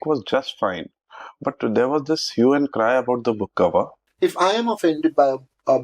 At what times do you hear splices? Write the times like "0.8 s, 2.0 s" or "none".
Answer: 4.0 s

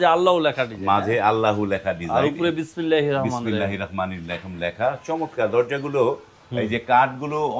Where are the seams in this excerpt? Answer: none

